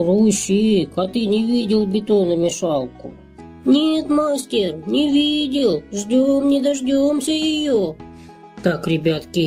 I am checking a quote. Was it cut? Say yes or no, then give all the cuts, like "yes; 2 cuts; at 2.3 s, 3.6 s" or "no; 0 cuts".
no; 0 cuts